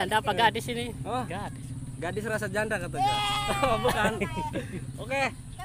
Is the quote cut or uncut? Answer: uncut